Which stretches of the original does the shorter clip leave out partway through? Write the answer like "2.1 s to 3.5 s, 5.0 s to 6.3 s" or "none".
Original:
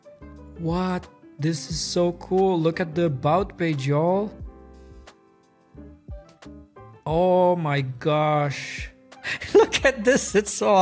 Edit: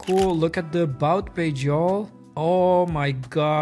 4.4 s to 6.9 s